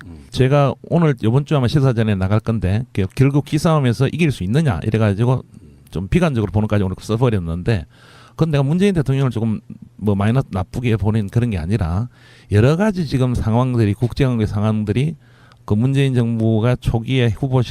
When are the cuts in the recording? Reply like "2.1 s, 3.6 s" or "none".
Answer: 4.5 s